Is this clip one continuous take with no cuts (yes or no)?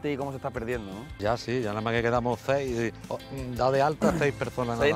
no